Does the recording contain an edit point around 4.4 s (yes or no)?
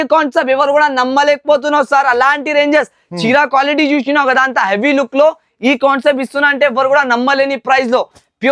no